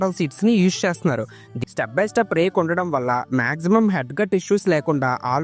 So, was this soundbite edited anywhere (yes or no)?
yes